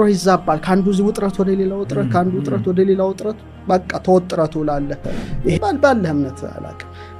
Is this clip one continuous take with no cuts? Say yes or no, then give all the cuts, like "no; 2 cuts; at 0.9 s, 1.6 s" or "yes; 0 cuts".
no; 1 cut; at 5.5 s